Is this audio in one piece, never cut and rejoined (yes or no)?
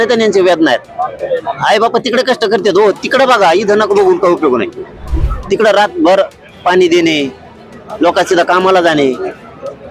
yes